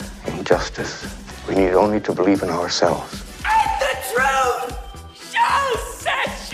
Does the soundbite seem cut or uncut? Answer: uncut